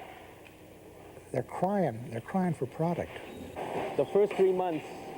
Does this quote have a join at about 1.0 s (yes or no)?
no